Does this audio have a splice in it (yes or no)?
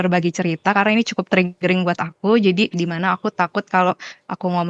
no